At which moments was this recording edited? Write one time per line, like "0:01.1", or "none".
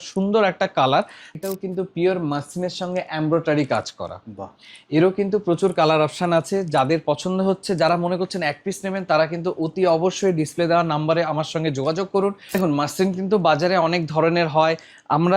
0:01.2
0:12.6